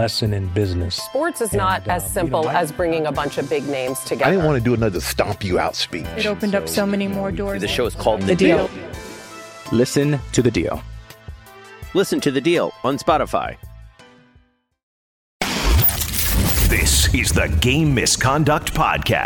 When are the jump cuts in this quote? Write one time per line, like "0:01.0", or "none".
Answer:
0:15.3